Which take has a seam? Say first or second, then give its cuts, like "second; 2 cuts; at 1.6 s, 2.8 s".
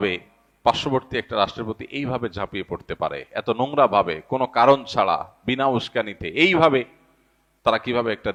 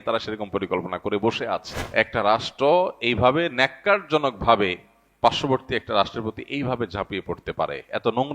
second; 1 cut; at 1.7 s